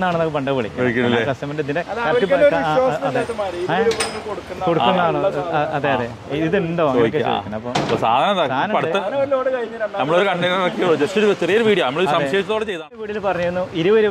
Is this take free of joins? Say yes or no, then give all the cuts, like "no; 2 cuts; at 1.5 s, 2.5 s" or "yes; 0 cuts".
no; 1 cut; at 13.1 s